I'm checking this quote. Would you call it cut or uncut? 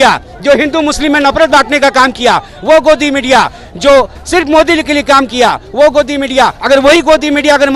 uncut